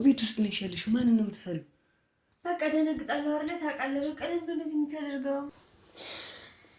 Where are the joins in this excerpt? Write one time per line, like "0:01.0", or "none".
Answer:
0:05.5